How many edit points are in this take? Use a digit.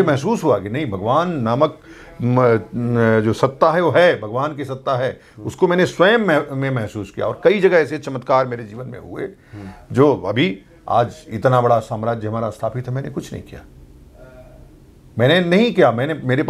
0